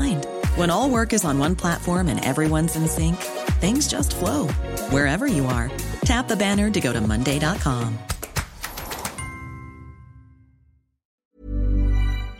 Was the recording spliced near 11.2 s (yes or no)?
yes